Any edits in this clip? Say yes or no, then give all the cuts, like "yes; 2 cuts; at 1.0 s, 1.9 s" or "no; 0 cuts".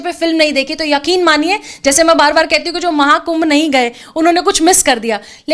no; 0 cuts